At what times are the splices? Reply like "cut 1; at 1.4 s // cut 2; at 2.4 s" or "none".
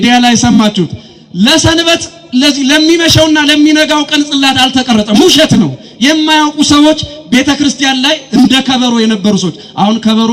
none